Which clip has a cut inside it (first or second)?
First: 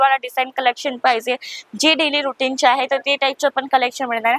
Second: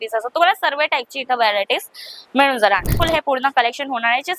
second